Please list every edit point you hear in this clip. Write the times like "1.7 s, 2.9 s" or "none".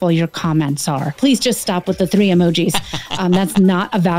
1.2 s